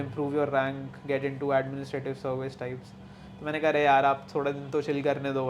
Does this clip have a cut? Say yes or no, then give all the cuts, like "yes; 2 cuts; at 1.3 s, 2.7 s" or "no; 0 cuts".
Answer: no; 0 cuts